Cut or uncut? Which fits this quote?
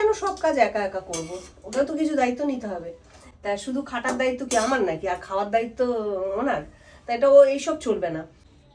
uncut